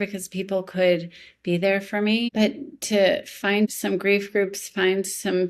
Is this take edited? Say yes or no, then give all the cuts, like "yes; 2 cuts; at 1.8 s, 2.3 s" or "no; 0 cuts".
yes; 2 cuts; at 2.3 s, 3.7 s